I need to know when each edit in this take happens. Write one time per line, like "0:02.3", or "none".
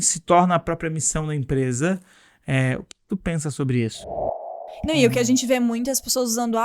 0:04.5